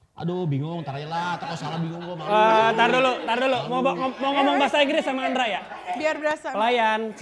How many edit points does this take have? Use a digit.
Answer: 0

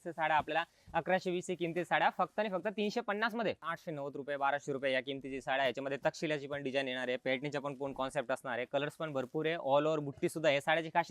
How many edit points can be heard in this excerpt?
1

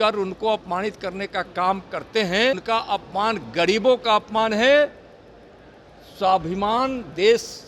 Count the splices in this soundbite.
1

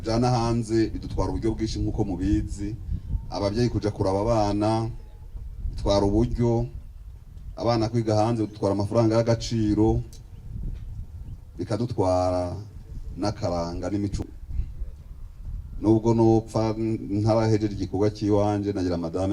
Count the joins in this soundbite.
1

